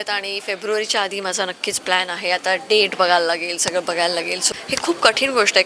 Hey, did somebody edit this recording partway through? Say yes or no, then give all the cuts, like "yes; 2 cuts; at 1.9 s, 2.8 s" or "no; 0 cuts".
yes; 1 cut; at 4.5 s